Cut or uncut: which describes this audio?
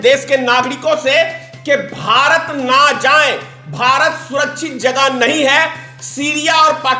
uncut